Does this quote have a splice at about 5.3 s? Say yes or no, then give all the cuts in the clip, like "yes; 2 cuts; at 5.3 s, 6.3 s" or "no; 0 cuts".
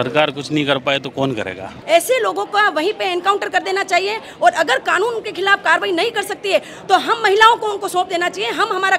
no; 1 cut; at 1.7 s